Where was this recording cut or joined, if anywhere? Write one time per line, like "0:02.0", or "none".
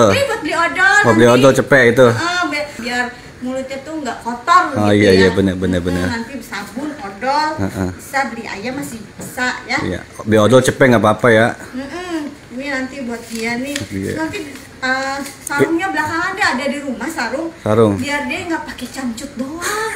0:02.8

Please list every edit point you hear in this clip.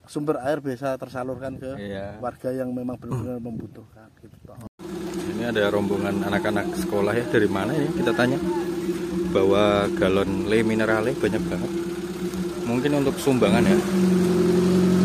0:04.6

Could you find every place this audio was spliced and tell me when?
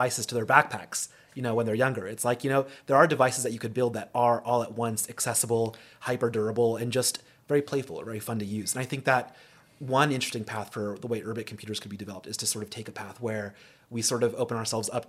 none

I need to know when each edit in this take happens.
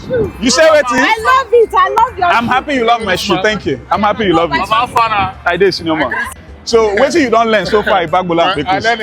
none

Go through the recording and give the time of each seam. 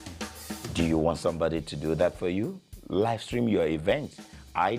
0:02.4

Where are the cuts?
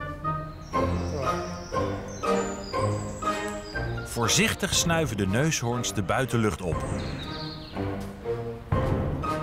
none

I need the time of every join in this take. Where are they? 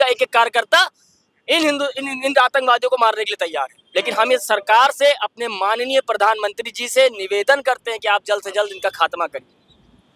none

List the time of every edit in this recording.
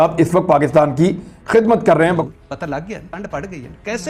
0:02.2

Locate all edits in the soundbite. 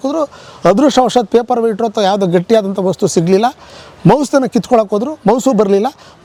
none

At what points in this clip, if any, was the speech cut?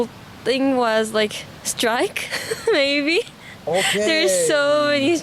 none

